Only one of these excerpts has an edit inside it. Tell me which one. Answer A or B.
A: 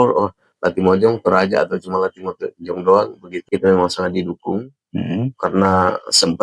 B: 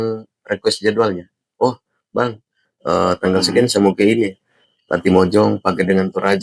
A